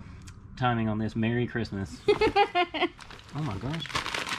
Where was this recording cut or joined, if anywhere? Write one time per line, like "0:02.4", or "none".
0:03.0